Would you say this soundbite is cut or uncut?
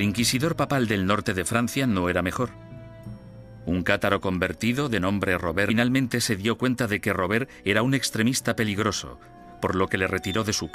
uncut